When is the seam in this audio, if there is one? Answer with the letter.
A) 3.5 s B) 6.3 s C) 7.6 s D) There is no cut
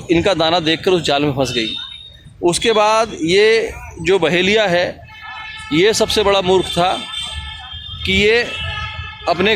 D